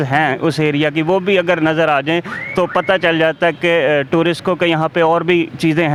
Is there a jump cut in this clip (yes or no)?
no